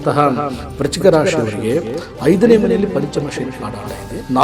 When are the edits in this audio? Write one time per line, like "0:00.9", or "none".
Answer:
none